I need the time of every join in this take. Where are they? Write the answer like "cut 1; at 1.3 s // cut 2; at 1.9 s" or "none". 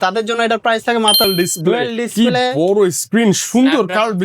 cut 1; at 1.2 s